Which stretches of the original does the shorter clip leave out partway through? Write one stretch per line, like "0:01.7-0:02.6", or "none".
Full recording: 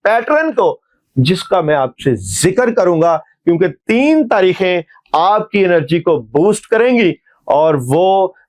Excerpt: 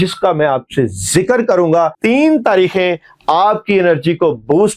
0:03.2-0:03.8